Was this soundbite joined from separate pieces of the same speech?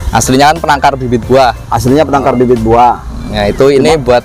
no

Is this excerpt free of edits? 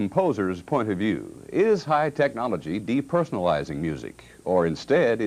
yes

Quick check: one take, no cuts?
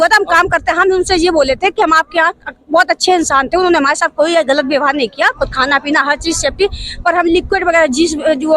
yes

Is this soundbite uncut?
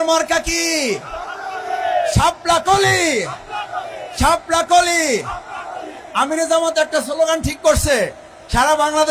yes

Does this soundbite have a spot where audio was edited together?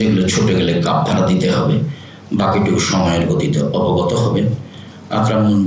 no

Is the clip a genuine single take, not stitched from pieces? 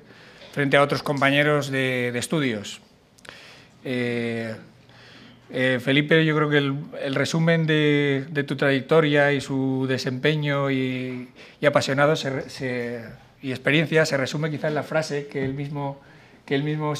no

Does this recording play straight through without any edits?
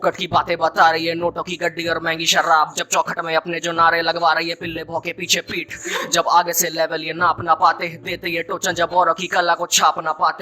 yes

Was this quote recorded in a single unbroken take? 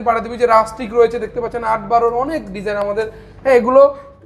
yes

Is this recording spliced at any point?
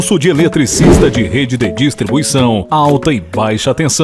no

